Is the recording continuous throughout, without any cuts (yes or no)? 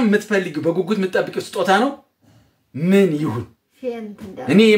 yes